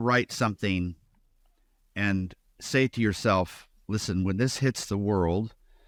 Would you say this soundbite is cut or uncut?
uncut